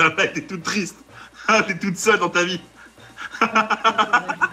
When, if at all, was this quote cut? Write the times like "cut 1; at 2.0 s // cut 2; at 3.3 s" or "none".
none